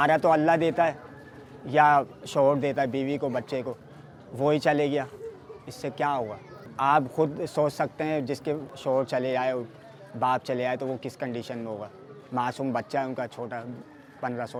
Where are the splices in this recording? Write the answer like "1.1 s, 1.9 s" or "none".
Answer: none